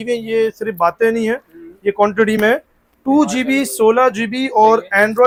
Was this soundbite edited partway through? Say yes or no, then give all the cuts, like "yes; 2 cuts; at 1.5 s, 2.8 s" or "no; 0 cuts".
no; 0 cuts